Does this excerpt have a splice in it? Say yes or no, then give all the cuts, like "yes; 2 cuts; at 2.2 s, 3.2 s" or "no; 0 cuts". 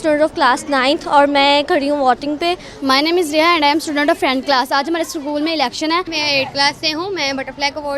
yes; 2 cuts; at 2.7 s, 6.1 s